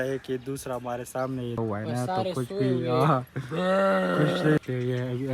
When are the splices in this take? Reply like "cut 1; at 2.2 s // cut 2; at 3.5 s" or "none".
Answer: cut 1; at 1.6 s // cut 2; at 4.6 s